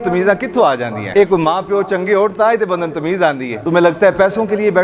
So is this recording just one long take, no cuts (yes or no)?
no